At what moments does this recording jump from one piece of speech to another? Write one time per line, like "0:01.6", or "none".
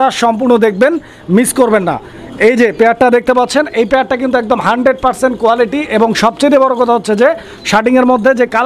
none